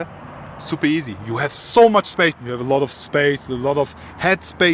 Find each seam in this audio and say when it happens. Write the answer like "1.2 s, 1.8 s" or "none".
2.4 s